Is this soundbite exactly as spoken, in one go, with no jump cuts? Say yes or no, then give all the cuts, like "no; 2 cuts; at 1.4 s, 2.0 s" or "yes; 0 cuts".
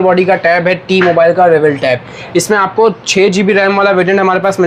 yes; 0 cuts